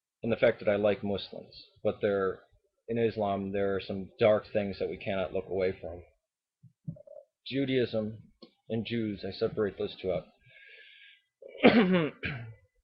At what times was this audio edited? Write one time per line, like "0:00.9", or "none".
0:04.8